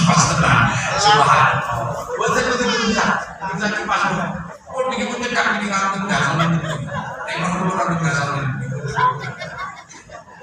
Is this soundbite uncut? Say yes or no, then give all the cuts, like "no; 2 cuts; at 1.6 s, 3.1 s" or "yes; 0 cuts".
yes; 0 cuts